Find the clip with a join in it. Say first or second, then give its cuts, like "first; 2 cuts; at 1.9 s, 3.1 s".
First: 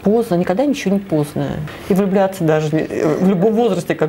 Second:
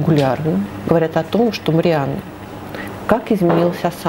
first; 1 cut; at 1.6 s